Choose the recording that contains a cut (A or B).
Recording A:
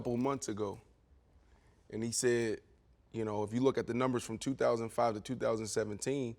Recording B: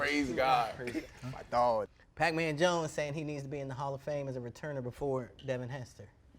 B